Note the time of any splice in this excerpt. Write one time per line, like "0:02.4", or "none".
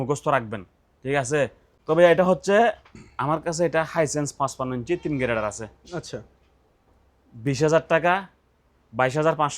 0:01.7